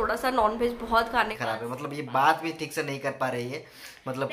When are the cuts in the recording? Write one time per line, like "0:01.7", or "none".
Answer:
0:01.3